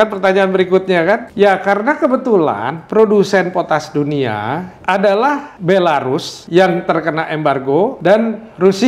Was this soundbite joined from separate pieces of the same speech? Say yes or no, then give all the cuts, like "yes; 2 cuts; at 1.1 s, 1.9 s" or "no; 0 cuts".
yes; 5 cuts; at 1.3 s, 4.7 s, 5.5 s, 6.3 s, 8.0 s